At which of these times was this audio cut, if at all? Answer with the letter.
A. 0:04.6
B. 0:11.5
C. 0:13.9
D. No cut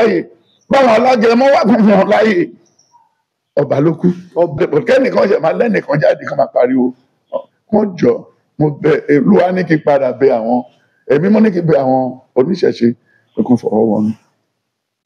A